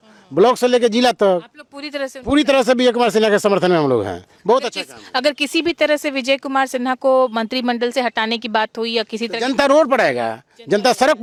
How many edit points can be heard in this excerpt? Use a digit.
0